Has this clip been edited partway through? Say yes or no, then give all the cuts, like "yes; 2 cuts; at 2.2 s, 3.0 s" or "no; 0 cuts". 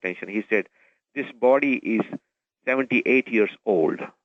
no; 0 cuts